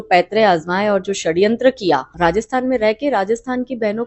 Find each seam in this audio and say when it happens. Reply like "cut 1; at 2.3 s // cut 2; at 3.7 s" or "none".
cut 1; at 2.1 s